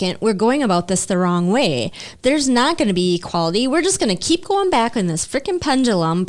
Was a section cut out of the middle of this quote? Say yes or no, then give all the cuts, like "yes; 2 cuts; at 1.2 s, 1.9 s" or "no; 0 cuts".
no; 0 cuts